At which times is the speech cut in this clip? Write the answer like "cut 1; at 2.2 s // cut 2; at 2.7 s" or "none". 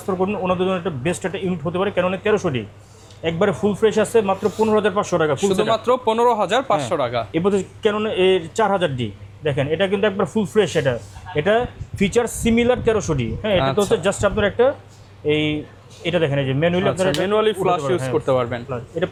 none